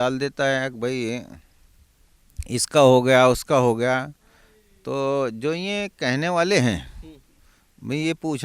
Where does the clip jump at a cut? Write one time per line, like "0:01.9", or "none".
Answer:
none